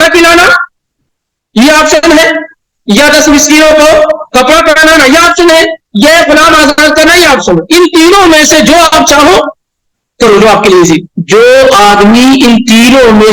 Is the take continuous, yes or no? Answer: no